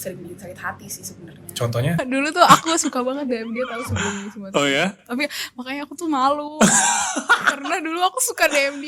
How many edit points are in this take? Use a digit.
1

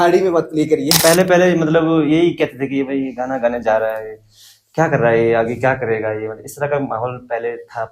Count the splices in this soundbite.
1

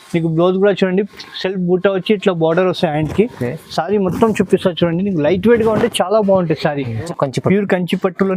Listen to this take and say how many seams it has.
1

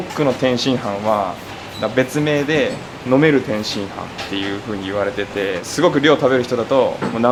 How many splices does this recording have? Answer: 0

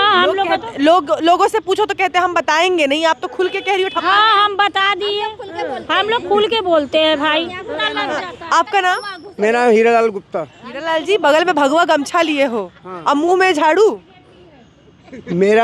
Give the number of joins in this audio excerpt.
1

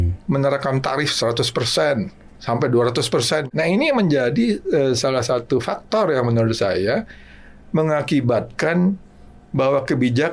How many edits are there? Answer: 1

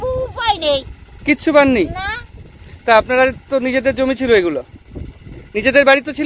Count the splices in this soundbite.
0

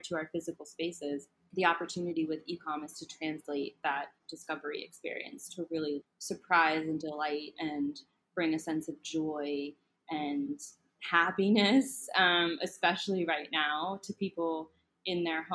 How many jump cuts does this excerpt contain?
2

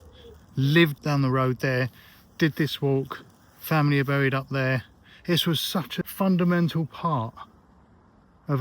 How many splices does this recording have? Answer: 2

